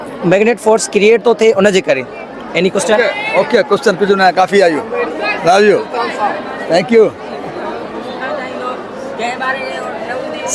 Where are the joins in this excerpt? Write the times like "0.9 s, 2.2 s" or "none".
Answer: none